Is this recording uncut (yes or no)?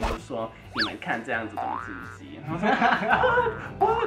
yes